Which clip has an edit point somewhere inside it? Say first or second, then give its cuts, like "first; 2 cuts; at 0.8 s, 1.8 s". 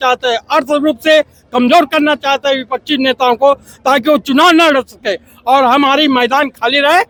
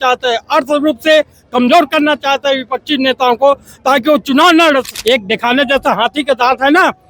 second; 1 cut; at 4.9 s